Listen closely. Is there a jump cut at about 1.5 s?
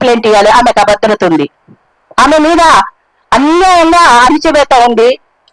no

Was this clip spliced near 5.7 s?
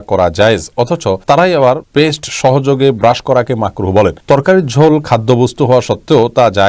no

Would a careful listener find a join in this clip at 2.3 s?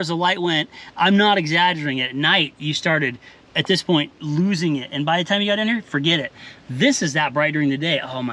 no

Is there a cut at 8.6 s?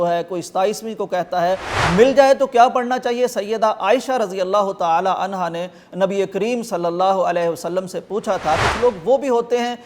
yes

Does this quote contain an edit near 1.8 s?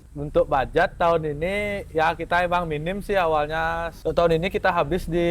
no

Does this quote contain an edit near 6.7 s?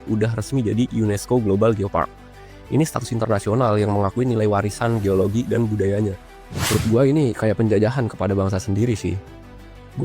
yes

